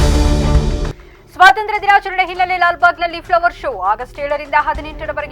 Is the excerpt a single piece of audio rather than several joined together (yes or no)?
no